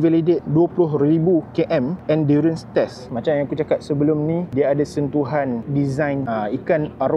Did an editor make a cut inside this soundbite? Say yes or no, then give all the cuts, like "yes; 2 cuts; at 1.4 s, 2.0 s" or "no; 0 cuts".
yes; 2 cuts; at 3.1 s, 6.2 s